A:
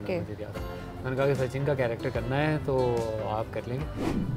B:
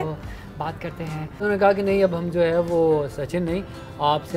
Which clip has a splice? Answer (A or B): B